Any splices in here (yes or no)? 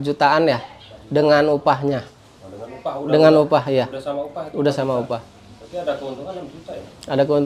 no